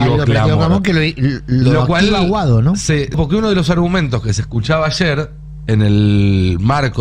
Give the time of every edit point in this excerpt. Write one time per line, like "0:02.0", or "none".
0:03.1